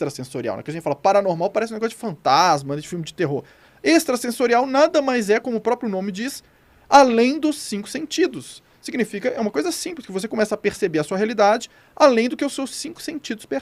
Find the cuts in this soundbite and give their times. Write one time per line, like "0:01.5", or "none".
none